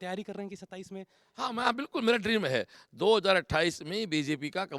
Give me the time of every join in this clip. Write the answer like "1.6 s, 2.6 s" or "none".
none